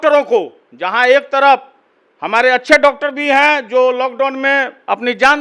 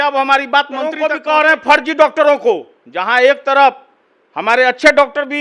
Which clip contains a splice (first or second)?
second